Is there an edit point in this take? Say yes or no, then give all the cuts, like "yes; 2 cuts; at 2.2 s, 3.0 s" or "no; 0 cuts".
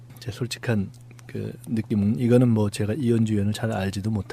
yes; 1 cut; at 2.3 s